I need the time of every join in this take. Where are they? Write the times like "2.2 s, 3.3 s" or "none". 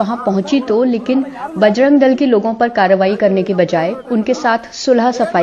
none